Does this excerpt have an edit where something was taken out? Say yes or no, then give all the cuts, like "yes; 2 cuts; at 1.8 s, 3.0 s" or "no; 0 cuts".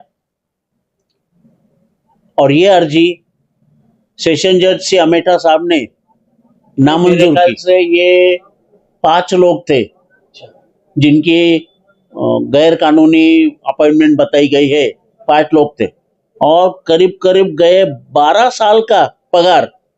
yes; 1 cut; at 7.4 s